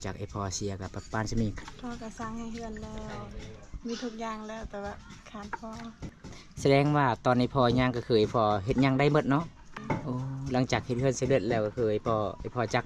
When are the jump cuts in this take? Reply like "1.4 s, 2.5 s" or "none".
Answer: 1.6 s, 6.1 s, 9.6 s